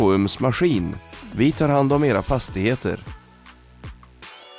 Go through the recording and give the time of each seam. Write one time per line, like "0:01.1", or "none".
none